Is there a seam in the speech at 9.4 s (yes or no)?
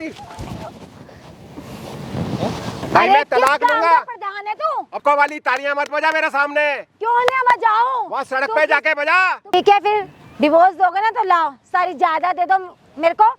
yes